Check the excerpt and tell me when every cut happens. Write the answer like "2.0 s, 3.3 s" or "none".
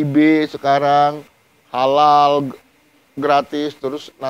none